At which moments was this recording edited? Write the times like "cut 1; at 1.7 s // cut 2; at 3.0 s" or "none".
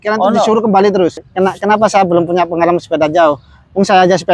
cut 1; at 1.2 s